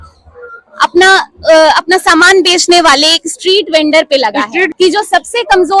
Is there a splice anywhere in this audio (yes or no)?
yes